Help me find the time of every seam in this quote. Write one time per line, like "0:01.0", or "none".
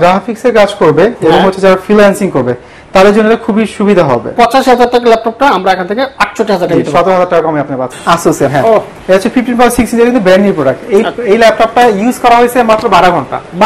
0:04.3
0:07.9
0:08.9